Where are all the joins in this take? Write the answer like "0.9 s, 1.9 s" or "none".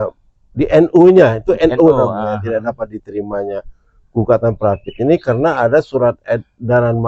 none